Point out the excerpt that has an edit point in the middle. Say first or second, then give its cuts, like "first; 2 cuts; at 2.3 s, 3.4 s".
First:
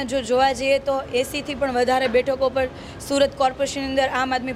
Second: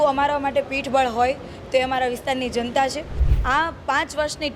second; 1 cut; at 3.3 s